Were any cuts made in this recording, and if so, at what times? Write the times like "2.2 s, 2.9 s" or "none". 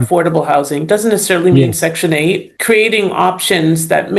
2.5 s